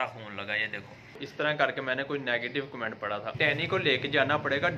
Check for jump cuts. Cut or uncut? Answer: cut